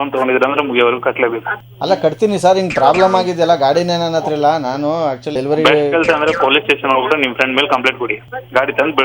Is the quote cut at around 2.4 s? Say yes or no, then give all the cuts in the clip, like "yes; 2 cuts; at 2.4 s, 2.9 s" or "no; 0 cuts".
no; 1 cut; at 5.3 s